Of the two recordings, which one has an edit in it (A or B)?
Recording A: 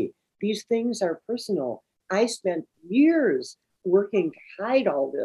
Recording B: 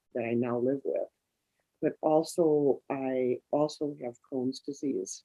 A